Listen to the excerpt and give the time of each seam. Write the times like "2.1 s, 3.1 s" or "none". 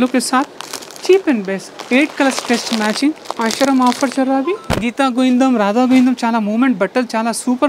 1.7 s, 3.3 s, 4.6 s